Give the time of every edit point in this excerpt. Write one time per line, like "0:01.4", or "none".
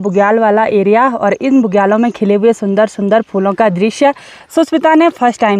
none